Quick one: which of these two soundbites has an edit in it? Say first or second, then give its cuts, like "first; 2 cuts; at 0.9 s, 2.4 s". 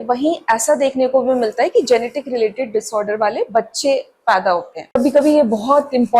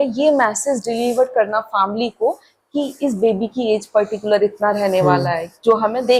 first; 1 cut; at 4.9 s